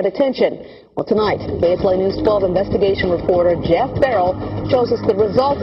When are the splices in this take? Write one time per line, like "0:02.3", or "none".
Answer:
0:01.4